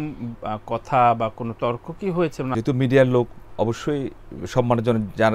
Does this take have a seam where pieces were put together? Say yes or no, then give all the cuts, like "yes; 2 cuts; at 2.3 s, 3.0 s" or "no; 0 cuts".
yes; 1 cut; at 2.5 s